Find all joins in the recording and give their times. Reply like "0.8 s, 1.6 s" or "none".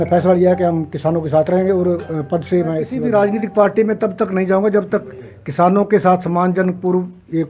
2.9 s